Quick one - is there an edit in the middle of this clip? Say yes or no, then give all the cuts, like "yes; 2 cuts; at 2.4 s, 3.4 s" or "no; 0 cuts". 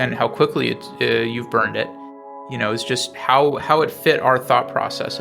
no; 0 cuts